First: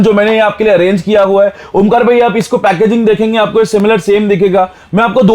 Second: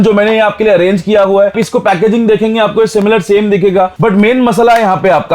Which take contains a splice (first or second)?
second